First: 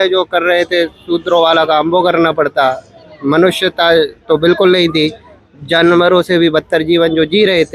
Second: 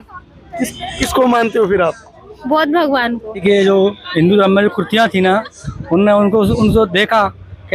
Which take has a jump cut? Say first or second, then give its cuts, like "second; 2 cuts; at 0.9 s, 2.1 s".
second; 1 cut; at 3.4 s